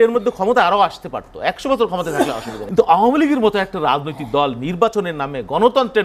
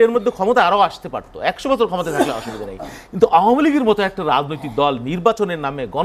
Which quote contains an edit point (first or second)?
first